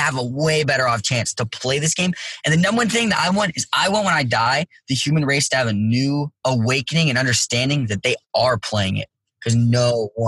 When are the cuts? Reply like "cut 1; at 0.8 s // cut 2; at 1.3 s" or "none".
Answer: cut 1; at 6.3 s

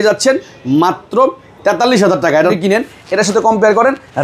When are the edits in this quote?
cut 1; at 2.5 s

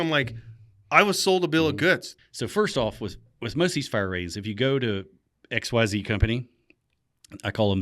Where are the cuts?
cut 1; at 2.1 s

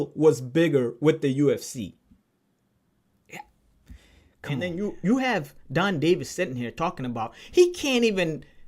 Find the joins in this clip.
cut 1; at 4.7 s

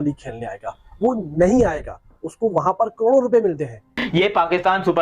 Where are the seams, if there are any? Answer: cut 1; at 3.9 s

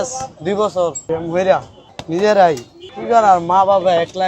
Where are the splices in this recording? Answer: cut 1; at 1.0 s // cut 2; at 1.8 s

